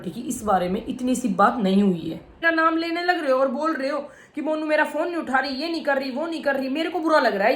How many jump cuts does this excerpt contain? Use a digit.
1